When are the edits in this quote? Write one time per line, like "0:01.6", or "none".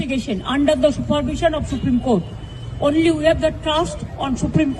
none